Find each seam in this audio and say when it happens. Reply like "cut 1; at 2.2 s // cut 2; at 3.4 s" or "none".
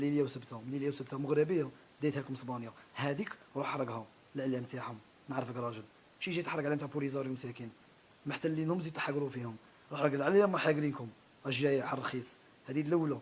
cut 1; at 1.8 s